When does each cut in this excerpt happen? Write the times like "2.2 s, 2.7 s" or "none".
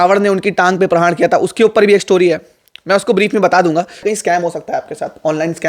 4.0 s

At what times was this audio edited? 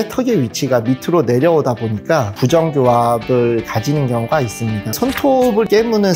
4.9 s

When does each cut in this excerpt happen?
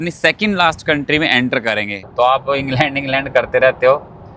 2.1 s

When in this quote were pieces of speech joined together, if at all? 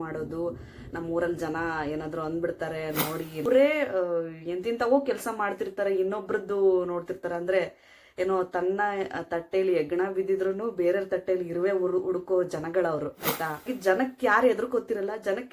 3.4 s, 13.6 s

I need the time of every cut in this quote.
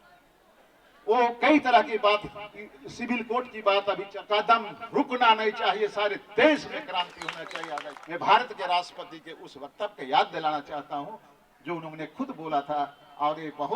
4.1 s, 7.9 s

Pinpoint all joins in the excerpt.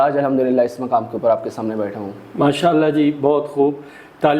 none

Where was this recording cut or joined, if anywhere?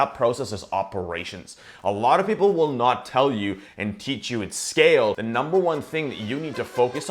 5.2 s

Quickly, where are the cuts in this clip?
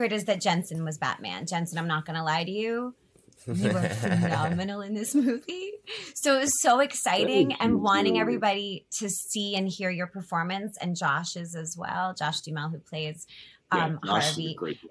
none

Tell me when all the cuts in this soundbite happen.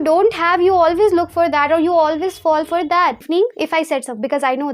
3.2 s

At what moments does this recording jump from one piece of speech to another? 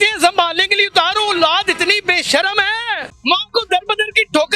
3.1 s

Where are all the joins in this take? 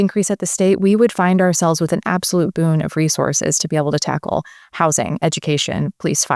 none

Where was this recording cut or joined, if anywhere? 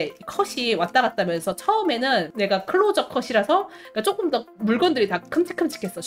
none

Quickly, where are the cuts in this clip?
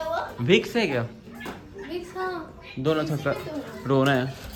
none

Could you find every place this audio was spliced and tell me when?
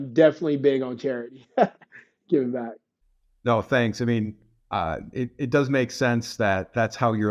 none

